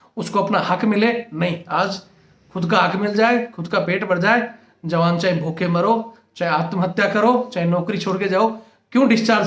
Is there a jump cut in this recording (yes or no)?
no